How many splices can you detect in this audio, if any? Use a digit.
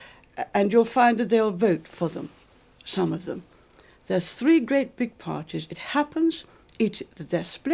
0